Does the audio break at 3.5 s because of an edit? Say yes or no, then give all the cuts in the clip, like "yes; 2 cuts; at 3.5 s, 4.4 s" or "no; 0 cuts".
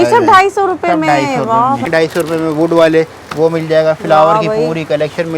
no; 1 cut; at 1.8 s